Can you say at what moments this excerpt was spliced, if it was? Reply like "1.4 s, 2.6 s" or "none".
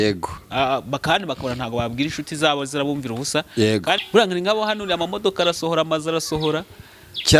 4.0 s

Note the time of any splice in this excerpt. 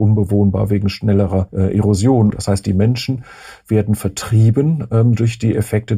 1.5 s, 2.4 s

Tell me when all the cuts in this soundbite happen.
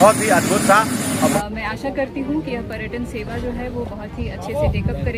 1.4 s

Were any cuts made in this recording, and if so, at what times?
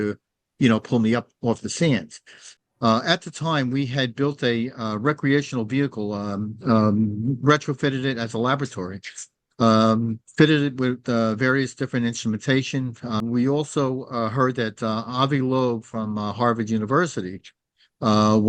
2.5 s, 13.2 s

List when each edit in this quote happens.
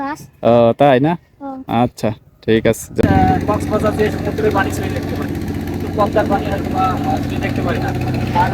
3.0 s

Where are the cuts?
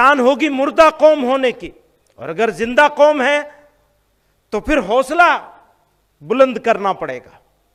none

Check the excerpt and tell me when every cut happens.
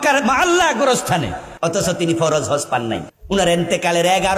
1.4 s, 3.1 s

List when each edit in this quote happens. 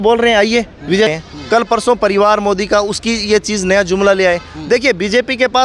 1.1 s

